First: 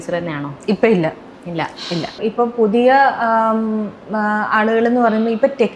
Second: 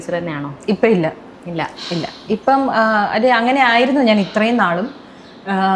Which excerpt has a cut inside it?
first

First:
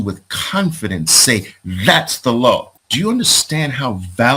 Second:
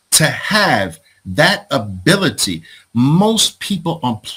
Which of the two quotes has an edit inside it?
first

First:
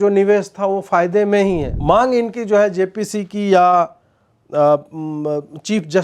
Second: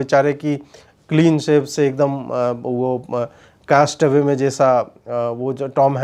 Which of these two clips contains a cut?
first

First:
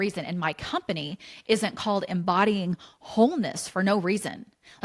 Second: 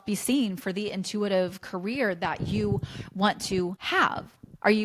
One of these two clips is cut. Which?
second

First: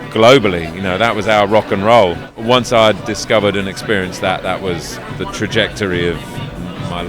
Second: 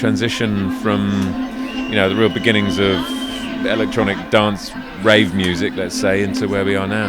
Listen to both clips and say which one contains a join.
first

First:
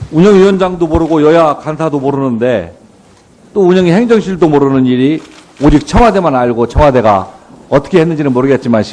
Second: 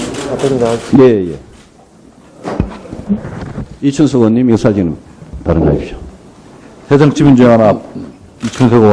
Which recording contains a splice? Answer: second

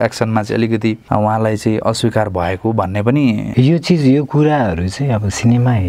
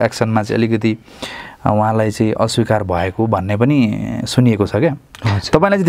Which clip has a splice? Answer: first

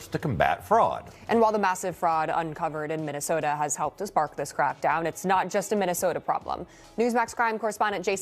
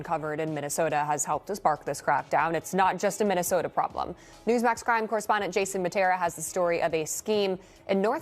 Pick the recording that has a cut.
first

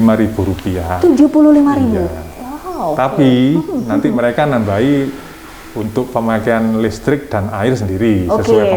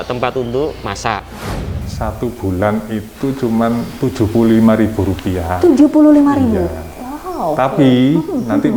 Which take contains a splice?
second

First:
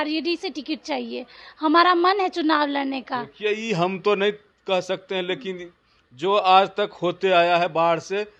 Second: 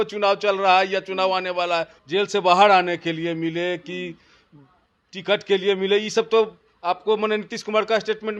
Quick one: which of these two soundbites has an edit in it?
second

